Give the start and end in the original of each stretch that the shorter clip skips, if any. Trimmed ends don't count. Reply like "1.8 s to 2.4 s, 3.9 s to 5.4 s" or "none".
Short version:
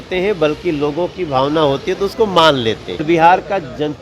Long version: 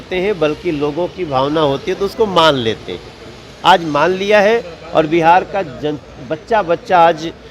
3.0 s to 5.1 s